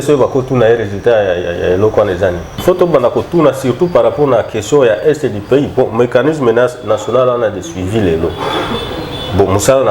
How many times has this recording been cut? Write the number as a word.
one